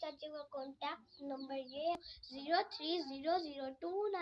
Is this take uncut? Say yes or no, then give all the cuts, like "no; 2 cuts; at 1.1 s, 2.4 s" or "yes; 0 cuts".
no; 1 cut; at 2.0 s